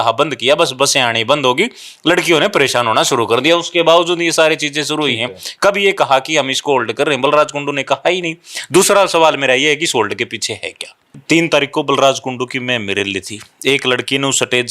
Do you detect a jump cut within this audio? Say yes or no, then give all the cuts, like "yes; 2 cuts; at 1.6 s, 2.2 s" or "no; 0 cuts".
yes; 1 cut; at 11.2 s